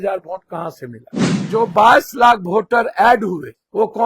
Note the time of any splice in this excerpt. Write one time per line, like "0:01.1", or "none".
0:01.3